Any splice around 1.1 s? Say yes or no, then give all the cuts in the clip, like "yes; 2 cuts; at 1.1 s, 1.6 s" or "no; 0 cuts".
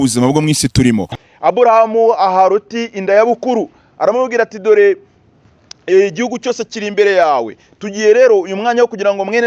yes; 1 cut; at 1.1 s